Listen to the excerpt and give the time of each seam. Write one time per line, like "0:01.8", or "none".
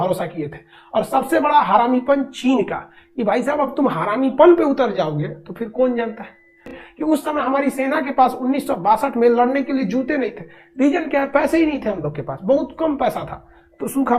0:06.8